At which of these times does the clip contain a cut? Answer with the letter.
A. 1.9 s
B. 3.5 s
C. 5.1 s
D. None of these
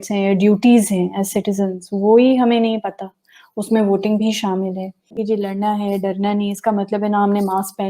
C